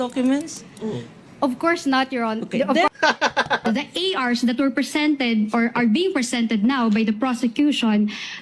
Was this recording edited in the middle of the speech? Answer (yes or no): yes